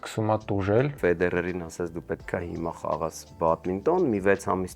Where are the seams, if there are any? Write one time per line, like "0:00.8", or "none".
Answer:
0:01.0